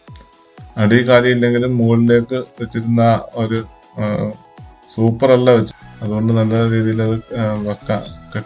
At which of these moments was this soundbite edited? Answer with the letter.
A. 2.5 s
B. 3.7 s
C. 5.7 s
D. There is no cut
C